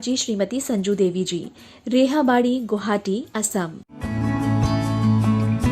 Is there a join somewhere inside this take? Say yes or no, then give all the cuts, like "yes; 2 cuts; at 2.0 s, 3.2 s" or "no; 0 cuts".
yes; 1 cut; at 3.9 s